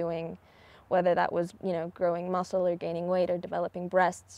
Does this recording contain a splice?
yes; 1 cut; at 1.5 s

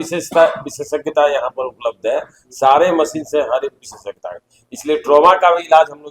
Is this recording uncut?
yes; 0 cuts

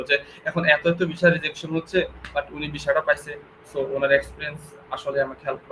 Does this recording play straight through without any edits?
yes; 0 cuts

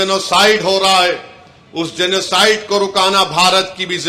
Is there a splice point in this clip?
no; 0 cuts

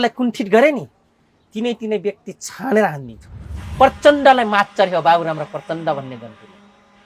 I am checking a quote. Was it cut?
yes; 1 cut; at 3.6 s

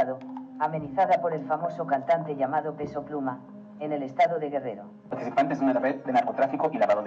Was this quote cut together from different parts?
yes; 1 cut; at 5.2 s

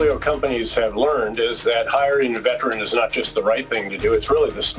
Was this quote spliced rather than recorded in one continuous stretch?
no; 0 cuts

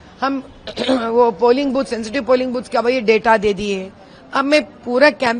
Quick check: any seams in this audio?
no; 0 cuts

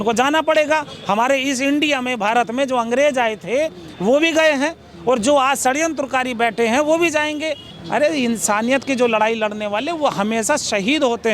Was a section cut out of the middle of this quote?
yes; 1 cut; at 7.7 s

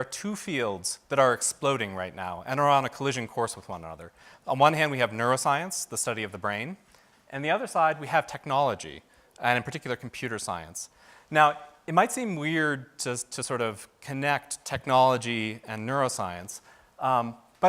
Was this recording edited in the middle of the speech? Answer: yes; 1 cut; at 2.4 s

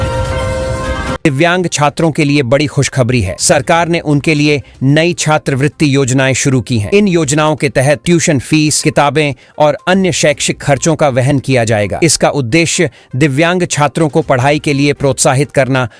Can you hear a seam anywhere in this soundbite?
yes; 1 cut; at 1.0 s

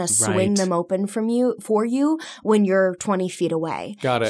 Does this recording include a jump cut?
no; 0 cuts

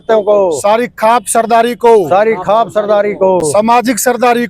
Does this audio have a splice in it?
no; 0 cuts

